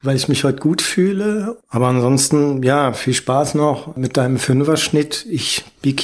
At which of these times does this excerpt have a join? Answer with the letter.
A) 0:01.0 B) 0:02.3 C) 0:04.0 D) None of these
C